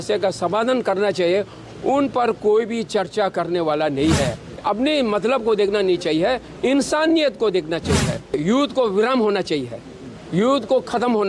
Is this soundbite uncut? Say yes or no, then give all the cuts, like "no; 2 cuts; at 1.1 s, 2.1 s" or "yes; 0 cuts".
no; 2 cuts; at 4.4 s, 8.3 s